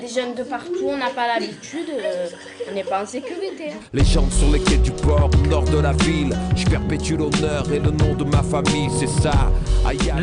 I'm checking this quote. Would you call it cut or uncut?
uncut